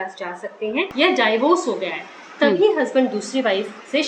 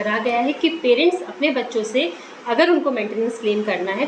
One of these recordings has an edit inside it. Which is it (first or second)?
first